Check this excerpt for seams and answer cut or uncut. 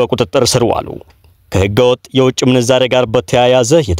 uncut